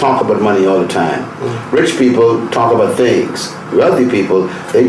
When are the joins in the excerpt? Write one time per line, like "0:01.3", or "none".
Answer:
none